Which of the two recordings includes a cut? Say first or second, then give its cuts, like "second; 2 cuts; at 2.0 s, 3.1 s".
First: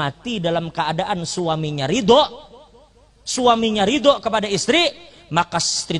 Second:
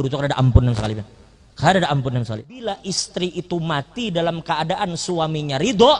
second; 1 cut; at 2.6 s